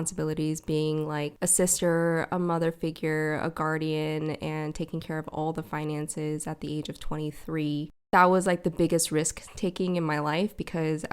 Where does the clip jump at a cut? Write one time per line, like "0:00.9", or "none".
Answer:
0:01.3
0:08.1